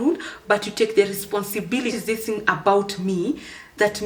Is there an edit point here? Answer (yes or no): yes